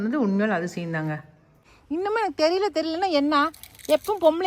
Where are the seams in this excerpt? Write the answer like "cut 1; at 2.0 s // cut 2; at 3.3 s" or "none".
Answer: cut 1; at 1.7 s